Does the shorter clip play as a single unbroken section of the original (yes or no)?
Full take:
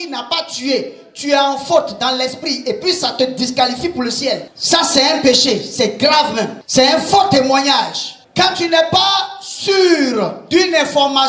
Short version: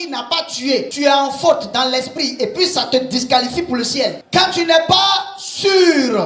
no